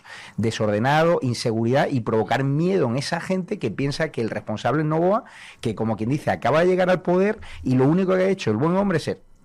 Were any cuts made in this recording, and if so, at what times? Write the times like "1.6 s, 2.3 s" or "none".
none